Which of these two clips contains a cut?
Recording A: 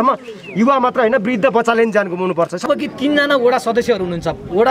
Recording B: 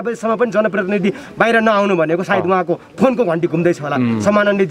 A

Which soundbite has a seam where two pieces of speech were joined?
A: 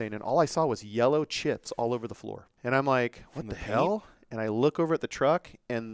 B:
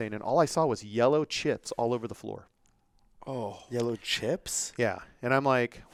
A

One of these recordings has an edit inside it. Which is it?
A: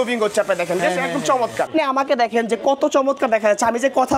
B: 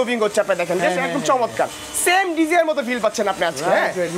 A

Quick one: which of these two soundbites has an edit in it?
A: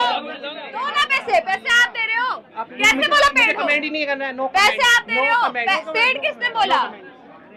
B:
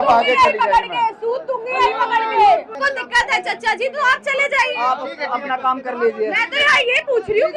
B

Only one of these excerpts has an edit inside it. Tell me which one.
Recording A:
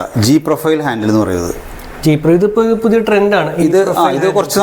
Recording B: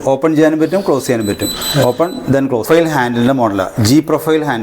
B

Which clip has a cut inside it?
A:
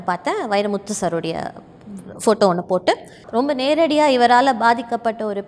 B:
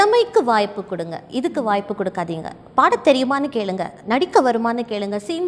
A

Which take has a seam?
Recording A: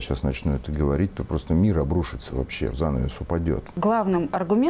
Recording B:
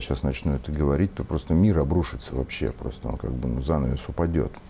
A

